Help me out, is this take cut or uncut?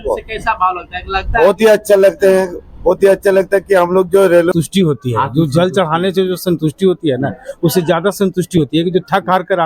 cut